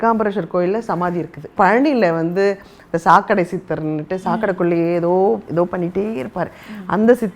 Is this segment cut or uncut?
cut